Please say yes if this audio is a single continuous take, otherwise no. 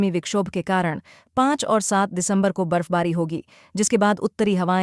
yes